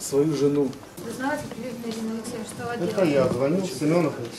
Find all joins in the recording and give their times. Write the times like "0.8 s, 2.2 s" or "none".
1.0 s